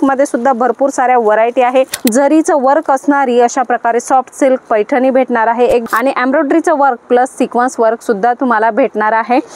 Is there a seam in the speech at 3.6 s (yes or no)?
no